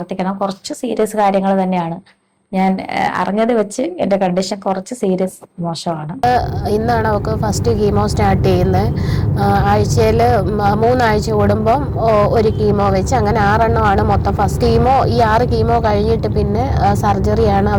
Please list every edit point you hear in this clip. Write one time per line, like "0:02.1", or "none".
0:06.2